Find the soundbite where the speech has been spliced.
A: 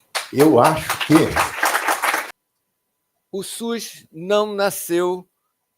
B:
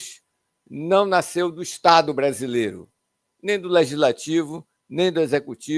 A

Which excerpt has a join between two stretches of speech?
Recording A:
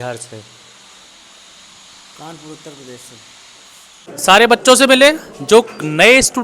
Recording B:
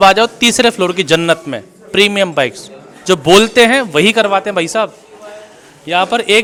A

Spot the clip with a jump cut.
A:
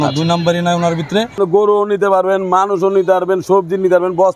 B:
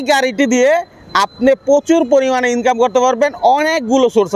A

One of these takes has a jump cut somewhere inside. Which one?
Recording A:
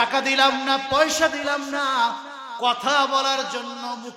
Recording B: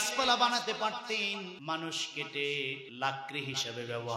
B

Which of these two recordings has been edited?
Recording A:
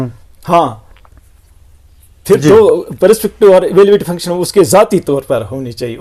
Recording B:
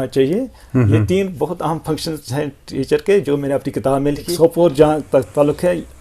B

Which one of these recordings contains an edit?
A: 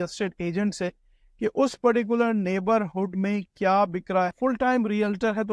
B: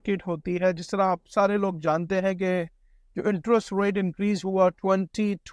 A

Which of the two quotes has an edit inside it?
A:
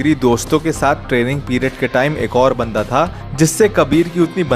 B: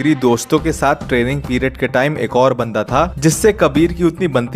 B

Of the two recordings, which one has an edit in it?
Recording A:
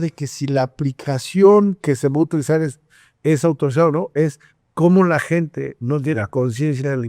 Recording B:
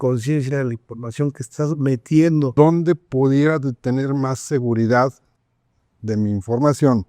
B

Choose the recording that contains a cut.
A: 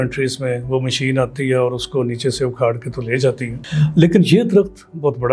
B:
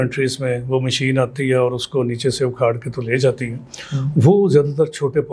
A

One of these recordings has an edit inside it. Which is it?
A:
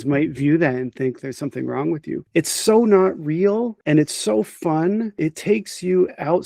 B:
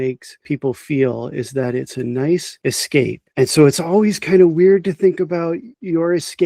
A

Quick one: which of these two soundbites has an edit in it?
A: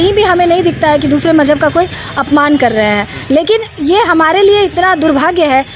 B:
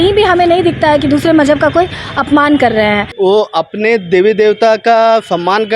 B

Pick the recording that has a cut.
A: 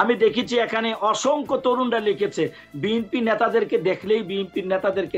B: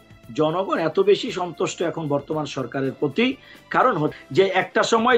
B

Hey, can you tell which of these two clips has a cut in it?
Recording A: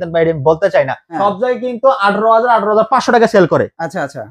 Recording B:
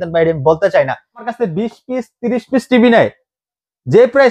A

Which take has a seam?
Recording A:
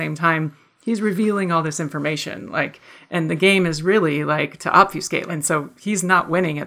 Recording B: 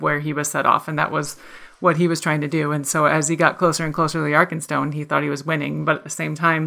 A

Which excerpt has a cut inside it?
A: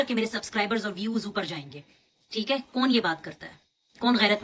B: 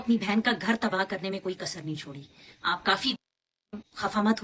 B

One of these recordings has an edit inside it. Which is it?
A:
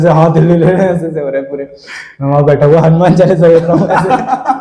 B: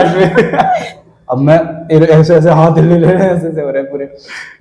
B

